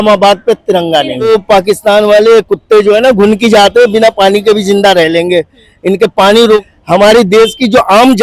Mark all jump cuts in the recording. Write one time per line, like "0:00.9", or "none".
0:01.3
0:06.6